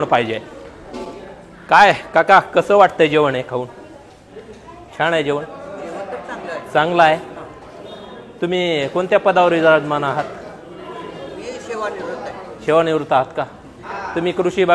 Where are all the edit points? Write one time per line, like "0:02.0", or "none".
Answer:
none

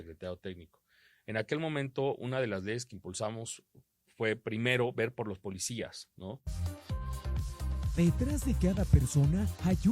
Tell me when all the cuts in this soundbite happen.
0:06.6

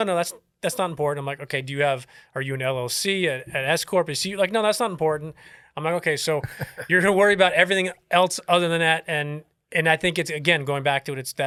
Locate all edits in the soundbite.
none

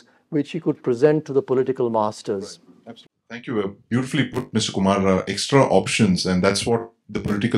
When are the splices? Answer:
none

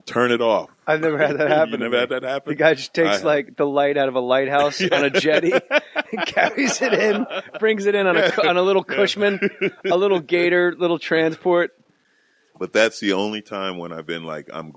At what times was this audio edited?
0:13.8

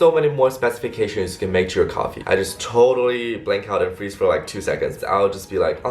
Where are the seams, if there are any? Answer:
0:02.2
0:05.0

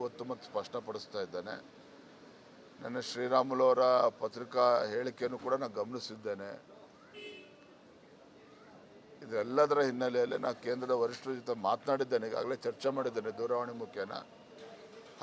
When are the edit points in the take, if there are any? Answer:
none

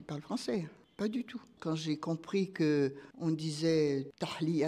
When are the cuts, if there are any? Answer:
0:01.5

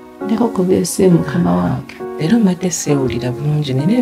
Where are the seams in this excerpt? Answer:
none

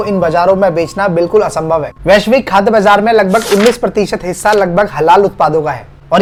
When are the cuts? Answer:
none

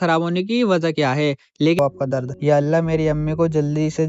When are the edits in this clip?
0:01.8

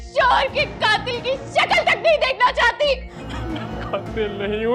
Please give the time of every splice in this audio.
0:03.2

